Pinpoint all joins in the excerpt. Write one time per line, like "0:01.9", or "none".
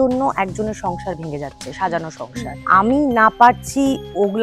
0:02.6